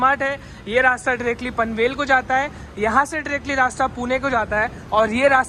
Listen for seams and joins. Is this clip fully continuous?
yes; 0 cuts

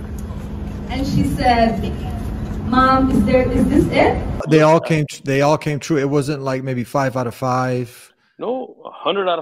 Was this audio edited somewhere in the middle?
yes; 1 cut; at 4.4 s

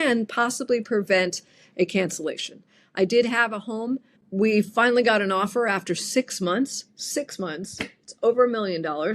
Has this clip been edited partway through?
yes; 1 cut; at 4.2 s

